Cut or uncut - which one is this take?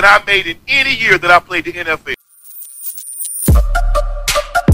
cut